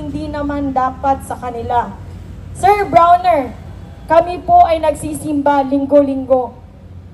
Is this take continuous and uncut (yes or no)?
yes